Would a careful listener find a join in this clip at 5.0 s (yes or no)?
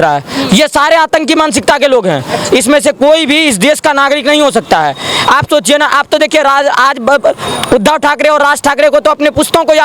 no